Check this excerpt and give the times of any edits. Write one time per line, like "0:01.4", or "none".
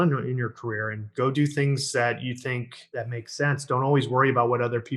0:02.8